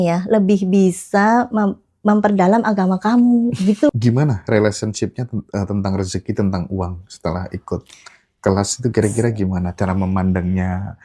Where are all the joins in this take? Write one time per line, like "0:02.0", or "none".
0:03.9

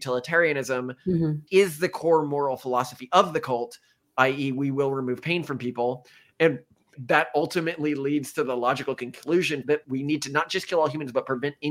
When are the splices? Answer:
0:01.4
0:06.9
0:09.8

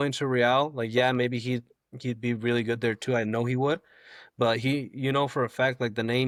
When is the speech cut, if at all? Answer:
none

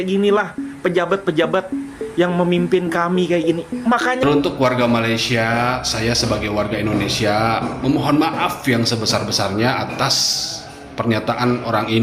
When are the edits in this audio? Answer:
0:04.2

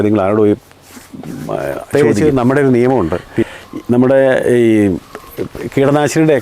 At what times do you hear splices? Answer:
0:01.9

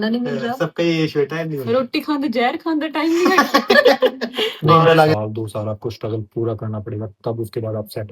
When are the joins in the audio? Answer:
0:05.2

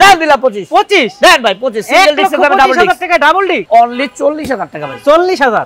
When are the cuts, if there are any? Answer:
0:03.6

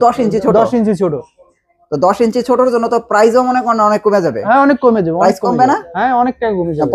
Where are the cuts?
none

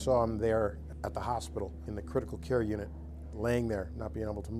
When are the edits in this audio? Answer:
none

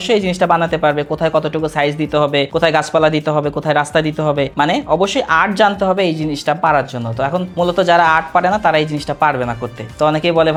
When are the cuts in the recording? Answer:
none

